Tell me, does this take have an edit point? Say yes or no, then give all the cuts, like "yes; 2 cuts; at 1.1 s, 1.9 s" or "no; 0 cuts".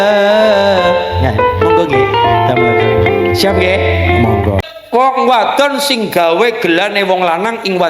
yes; 1 cut; at 4.6 s